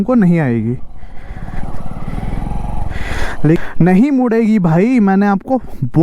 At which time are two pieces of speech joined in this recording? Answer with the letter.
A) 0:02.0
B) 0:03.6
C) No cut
B